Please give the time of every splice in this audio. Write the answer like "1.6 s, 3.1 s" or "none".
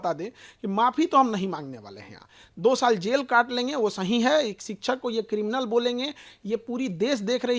none